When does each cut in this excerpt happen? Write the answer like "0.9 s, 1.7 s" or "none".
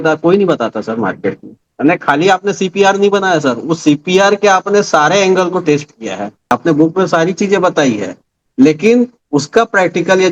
1.6 s, 6.5 s